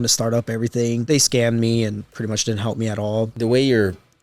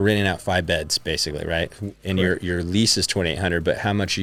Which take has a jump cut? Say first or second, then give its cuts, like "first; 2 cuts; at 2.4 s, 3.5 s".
first; 3 cuts; at 1.0 s, 2.1 s, 3.3 s